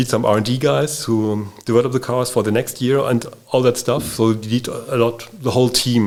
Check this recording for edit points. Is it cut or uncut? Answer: uncut